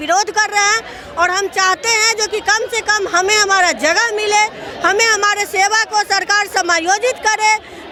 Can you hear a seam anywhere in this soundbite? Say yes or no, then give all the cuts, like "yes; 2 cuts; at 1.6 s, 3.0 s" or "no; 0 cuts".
no; 0 cuts